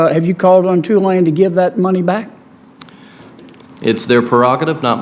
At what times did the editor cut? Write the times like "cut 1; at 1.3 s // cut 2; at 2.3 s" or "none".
cut 1; at 3.4 s